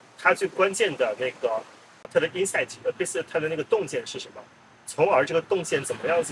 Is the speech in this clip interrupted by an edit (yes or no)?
no